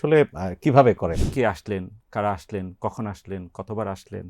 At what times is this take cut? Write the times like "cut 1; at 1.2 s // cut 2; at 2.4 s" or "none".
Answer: cut 1; at 1.2 s

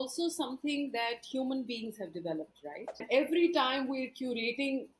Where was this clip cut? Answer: cut 1; at 3.0 s

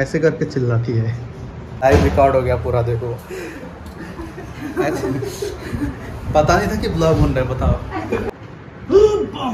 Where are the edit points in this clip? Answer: cut 1; at 8.3 s

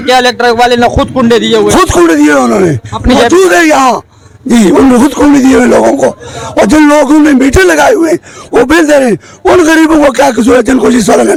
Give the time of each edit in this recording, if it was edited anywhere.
none

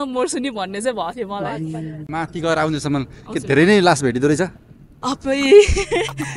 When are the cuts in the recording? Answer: cut 1; at 2.0 s

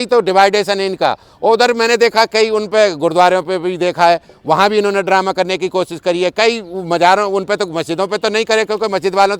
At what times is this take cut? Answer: none

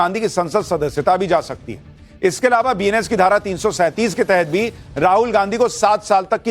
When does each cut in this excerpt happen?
cut 1; at 4.6 s

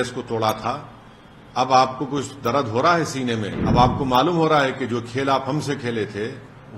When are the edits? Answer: cut 1; at 3.6 s

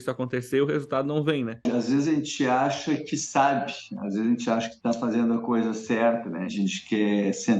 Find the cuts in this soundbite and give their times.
cut 1; at 1.6 s // cut 2; at 4.7 s // cut 3; at 6.5 s

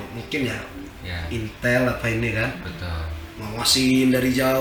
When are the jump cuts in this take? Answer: none

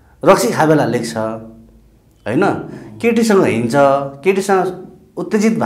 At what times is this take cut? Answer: none

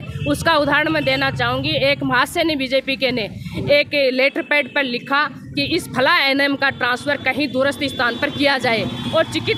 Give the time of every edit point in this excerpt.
none

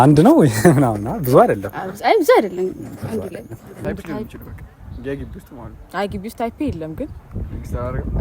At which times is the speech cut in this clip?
cut 1; at 3.8 s

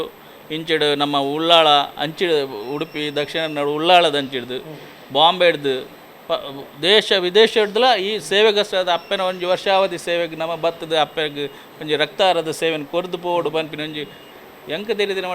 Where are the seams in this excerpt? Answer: cut 1; at 14.2 s

